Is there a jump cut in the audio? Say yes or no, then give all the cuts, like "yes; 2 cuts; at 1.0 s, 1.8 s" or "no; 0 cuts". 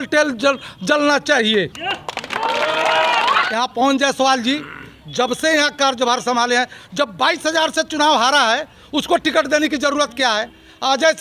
yes; 1 cut; at 3.5 s